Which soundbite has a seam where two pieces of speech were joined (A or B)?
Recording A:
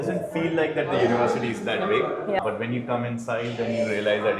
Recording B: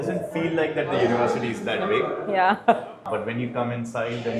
A